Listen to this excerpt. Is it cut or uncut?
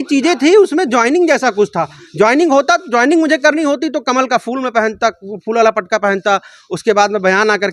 uncut